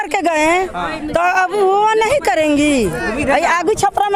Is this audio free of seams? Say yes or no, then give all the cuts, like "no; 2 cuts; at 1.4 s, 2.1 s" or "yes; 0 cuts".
yes; 0 cuts